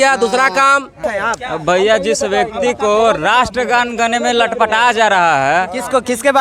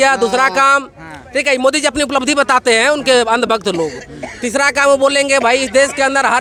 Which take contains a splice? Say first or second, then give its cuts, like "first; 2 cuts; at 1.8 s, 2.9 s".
first; 1 cut; at 1.0 s